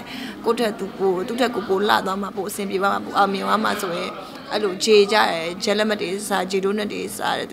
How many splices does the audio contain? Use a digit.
0